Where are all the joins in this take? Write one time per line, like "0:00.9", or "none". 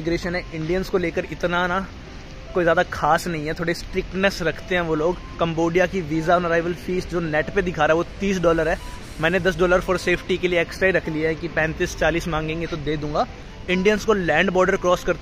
0:05.3
0:13.5